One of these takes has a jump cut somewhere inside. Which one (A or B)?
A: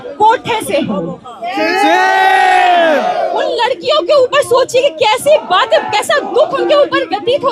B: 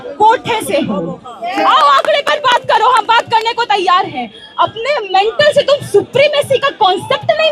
B